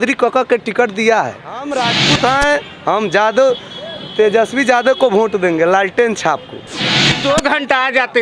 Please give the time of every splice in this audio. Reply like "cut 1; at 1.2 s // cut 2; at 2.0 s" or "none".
cut 1; at 1.6 s // cut 2; at 7.1 s